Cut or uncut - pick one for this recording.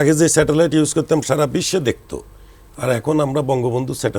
uncut